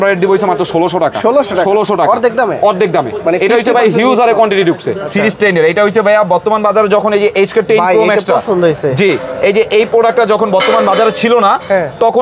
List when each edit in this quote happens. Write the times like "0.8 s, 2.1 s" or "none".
5.0 s